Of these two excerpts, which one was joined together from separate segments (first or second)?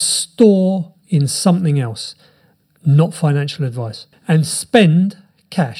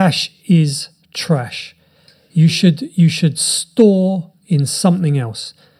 first